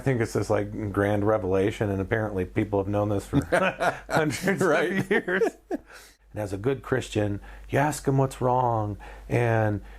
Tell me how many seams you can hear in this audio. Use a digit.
1